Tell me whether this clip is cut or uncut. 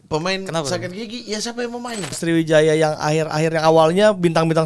cut